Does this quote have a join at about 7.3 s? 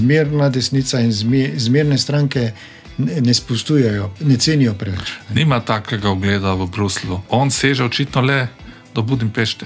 yes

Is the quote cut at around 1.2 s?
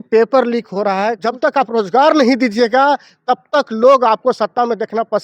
yes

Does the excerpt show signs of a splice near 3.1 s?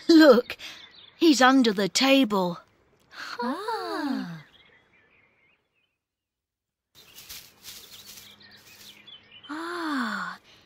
no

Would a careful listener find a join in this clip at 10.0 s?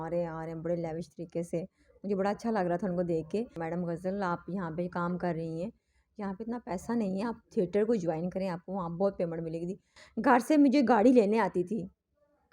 yes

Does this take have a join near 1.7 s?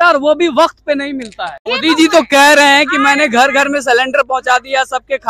yes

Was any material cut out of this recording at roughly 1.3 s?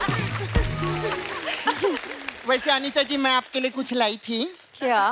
yes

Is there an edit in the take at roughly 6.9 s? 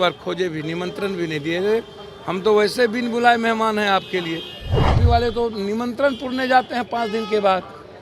no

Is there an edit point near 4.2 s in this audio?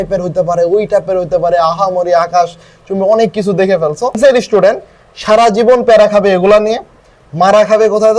yes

